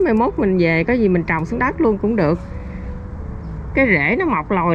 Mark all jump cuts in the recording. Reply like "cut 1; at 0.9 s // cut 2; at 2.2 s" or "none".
none